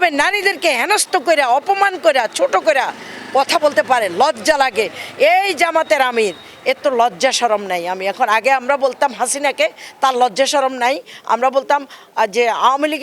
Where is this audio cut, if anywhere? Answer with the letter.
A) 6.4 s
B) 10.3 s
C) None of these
C